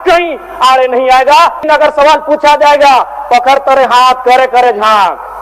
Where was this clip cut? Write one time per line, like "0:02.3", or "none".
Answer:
0:01.6